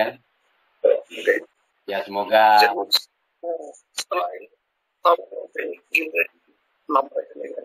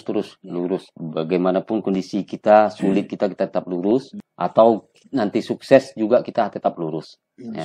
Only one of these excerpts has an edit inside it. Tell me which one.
second; 2 cuts; at 1.0 s, 4.2 s

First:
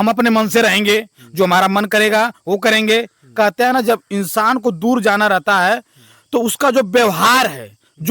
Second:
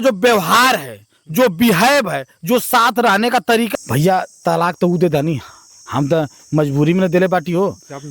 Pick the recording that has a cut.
second; 1 cut; at 3.7 s

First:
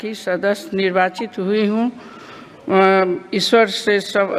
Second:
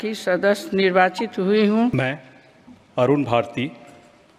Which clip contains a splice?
second; 1 cut; at 1.9 s

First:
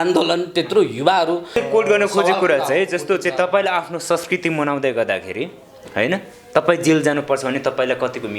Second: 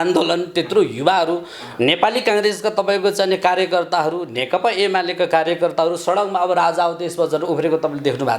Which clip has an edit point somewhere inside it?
first; 1 cut; at 1.6 s

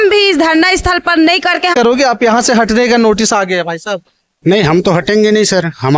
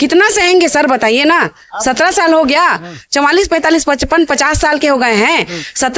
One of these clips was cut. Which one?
first; 1 cut; at 1.7 s

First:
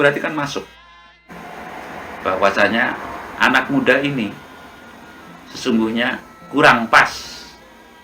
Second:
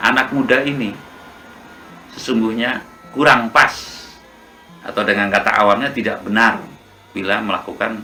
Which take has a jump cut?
first; 1 cut; at 1.2 s

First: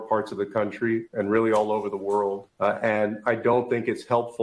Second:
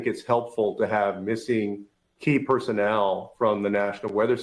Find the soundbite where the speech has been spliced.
first; 1 cut; at 2.5 s

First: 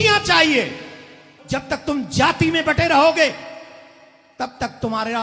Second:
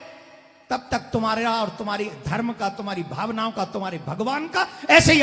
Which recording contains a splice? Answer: first; 1 cut; at 1.3 s

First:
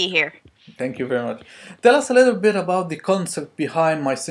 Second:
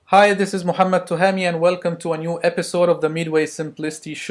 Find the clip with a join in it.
second; 1 cut; at 1.1 s

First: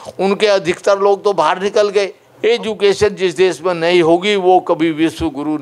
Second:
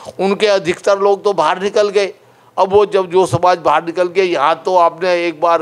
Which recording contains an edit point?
first; 1 cut; at 2.2 s

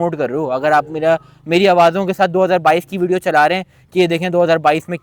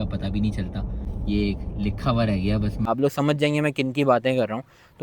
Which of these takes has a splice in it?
second; 2 cuts; at 1.0 s, 2.8 s

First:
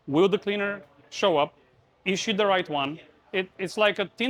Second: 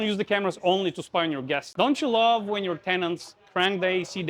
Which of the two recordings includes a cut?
second; 1 cut; at 1.7 s

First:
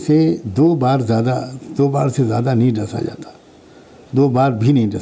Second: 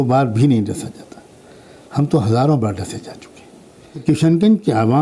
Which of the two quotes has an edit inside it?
second; 1 cut; at 4.0 s

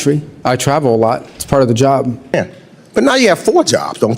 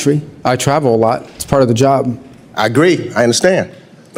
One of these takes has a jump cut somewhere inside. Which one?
first; 1 cut; at 2.3 s

